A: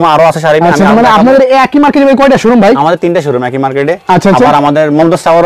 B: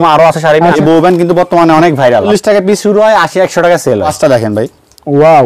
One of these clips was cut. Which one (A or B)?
B